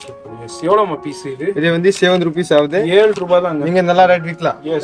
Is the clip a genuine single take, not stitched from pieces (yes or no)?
yes